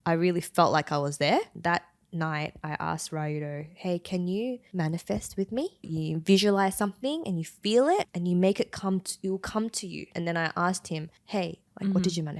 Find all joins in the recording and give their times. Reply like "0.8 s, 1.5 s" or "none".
1.5 s, 4.6 s, 5.9 s, 8.1 s, 10.1 s